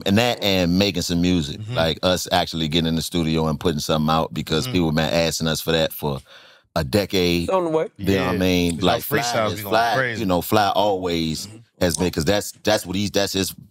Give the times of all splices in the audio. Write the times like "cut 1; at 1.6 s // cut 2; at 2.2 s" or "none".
none